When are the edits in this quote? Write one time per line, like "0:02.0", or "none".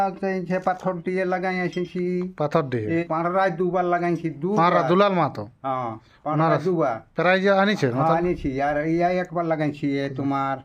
0:03.0